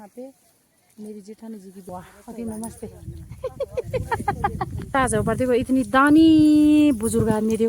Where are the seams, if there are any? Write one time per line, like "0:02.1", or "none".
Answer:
0:01.8
0:04.9